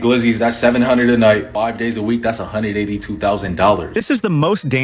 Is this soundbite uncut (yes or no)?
no